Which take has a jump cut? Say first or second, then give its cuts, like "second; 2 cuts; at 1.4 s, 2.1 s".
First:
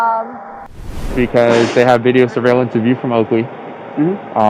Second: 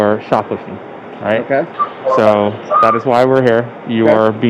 first; 1 cut; at 1.0 s